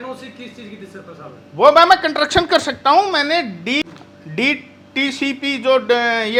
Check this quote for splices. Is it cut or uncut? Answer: uncut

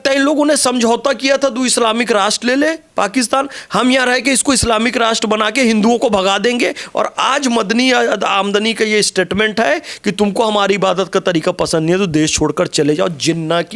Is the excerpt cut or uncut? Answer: uncut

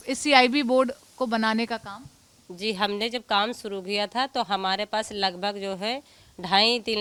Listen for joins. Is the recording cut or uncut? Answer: uncut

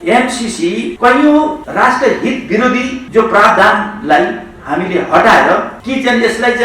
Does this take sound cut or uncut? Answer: cut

